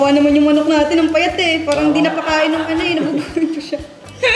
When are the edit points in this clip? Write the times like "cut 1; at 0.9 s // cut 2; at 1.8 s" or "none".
none

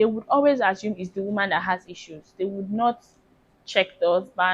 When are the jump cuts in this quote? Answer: none

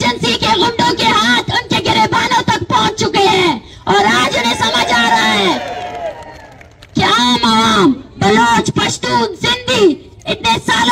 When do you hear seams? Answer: none

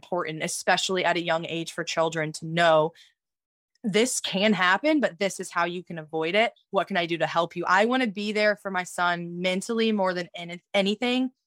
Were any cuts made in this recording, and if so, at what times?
none

